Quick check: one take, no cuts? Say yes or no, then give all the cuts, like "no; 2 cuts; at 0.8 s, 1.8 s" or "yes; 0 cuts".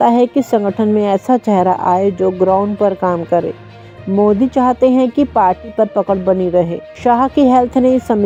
yes; 0 cuts